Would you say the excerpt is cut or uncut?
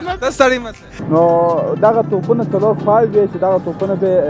cut